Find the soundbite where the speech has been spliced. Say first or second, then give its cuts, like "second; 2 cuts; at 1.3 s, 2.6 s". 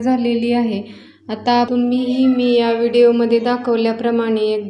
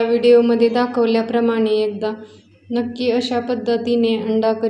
first; 1 cut; at 1.7 s